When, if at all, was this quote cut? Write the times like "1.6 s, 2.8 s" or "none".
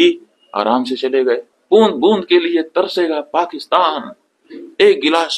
1.5 s